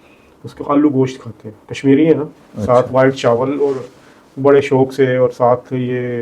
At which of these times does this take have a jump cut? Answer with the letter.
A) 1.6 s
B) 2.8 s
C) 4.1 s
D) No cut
D